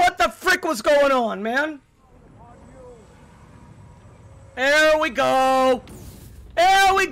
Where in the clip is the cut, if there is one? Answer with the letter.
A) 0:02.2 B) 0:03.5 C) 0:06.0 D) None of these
A